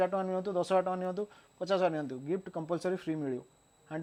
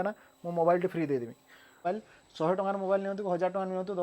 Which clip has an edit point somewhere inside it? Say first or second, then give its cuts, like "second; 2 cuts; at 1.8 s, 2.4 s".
second; 1 cut; at 1.8 s